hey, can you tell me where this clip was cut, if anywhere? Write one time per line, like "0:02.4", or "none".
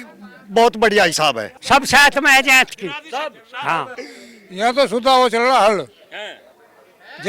0:01.5
0:04.0

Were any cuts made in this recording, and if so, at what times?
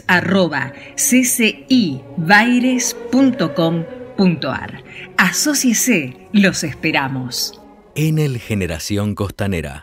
0:07.8

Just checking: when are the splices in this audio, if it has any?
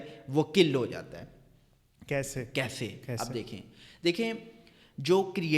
none

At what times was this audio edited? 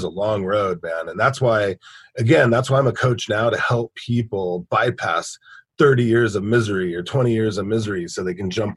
none

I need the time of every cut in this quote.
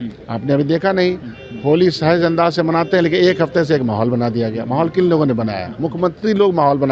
none

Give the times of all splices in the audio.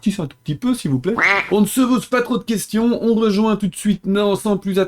0:01.4

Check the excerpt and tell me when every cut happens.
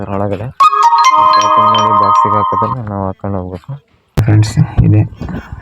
0:04.2

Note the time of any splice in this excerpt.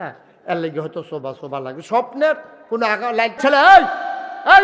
0:03.4

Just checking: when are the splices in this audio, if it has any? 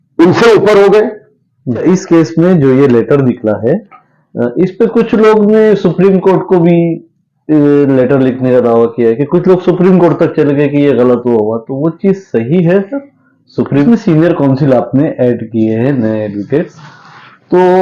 0:01.8
0:13.8

